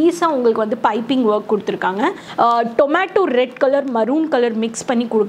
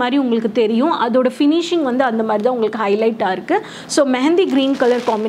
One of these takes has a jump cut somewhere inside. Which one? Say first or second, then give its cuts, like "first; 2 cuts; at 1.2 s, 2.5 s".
first; 1 cut; at 2.2 s